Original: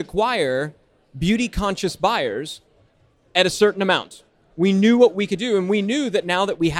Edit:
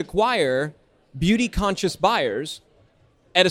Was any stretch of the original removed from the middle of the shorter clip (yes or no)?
no